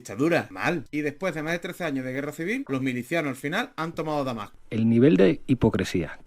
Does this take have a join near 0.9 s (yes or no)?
yes